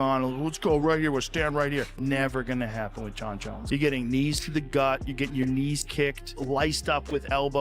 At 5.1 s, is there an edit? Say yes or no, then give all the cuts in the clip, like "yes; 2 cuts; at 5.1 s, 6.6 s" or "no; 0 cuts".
no; 3 cuts; at 1.9 s, 3.5 s, 6.3 s